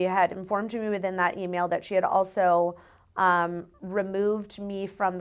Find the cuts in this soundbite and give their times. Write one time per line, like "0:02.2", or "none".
none